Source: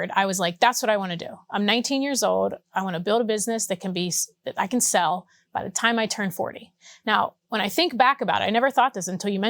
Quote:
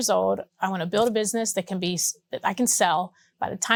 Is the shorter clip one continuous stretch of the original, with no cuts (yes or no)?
yes